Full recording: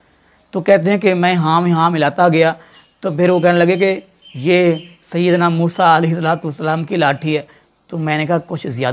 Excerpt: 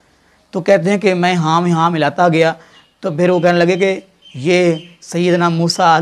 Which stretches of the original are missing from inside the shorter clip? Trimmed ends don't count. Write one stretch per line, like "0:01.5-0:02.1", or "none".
none

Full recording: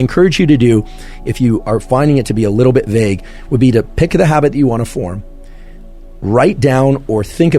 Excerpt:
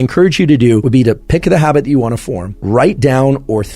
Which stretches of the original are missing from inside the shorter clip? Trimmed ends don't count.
0:00.8-0:03.5
0:05.2-0:06.1

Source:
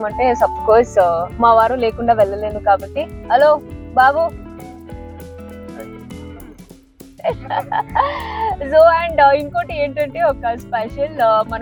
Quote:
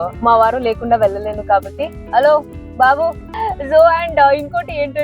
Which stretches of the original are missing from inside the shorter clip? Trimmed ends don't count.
0:04.5-0:08.3

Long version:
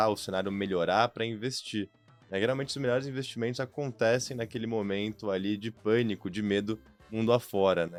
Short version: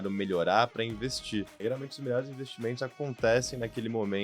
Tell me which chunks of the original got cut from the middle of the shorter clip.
0:01.9-0:02.3

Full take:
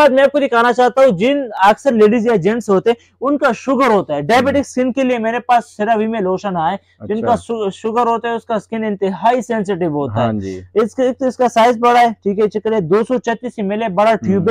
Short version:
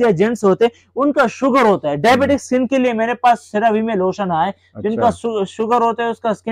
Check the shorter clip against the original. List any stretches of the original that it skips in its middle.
none

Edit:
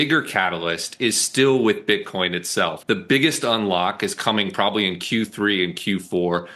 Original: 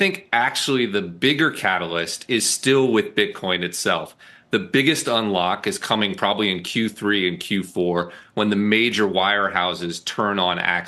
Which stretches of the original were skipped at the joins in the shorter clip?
0:04.1-0:04.4

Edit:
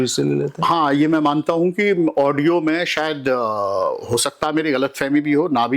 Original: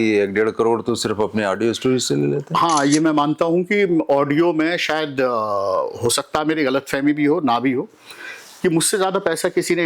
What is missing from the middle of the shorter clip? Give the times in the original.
none

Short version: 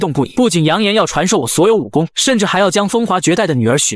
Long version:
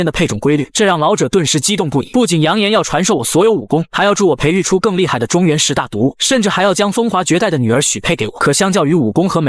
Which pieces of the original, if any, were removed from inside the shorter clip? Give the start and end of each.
0:03.9-0:06.2

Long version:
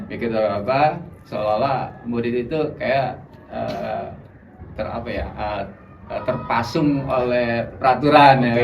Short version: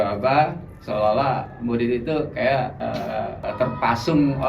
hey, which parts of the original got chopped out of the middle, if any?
0:03.5-0:05.7

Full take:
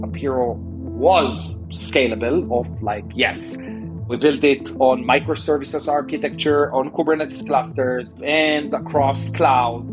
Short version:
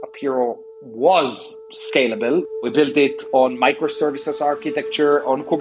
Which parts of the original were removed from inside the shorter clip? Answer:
0:02.5-0:03.9

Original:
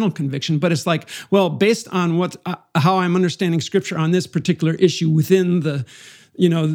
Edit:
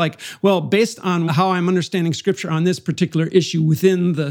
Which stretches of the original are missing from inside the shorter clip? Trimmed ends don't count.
0:02.1-0:02.7

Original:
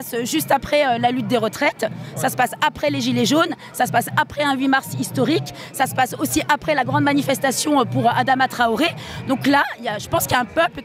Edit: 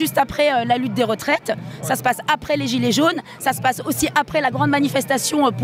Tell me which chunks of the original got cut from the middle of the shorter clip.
0:03.6-0:05.6

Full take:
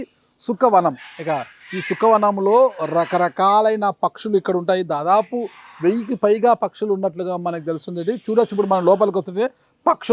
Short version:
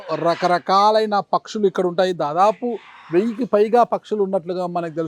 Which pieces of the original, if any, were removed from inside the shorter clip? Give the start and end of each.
none

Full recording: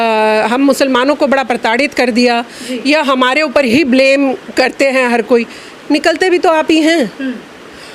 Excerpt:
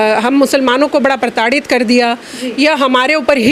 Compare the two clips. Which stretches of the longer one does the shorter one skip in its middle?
none

